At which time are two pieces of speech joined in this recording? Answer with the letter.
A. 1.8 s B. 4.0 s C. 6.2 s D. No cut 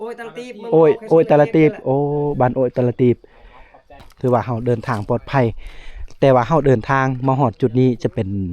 B